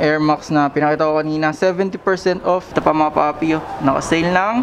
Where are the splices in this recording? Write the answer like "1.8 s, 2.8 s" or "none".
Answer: 2.7 s

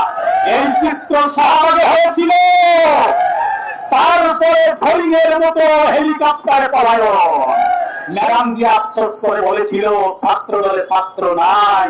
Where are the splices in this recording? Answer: 8.0 s

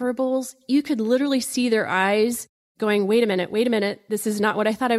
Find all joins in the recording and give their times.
none

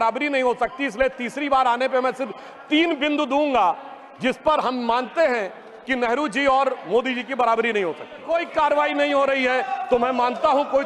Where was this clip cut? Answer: 8.2 s

